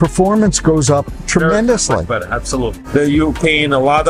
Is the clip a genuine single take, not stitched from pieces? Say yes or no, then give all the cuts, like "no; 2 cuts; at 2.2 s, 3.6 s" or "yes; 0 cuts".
no; 1 cut; at 2.8 s